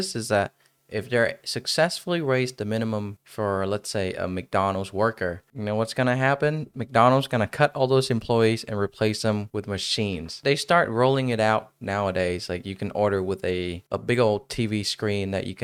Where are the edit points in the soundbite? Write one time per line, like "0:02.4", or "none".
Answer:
none